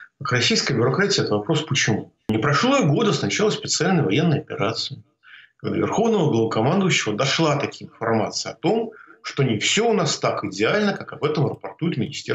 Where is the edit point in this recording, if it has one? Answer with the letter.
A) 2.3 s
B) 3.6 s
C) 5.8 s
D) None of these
A